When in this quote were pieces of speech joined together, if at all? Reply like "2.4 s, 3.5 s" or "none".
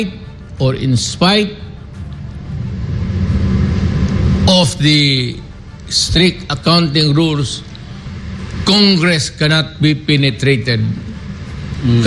none